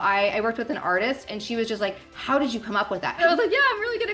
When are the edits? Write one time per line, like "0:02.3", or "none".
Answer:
0:03.2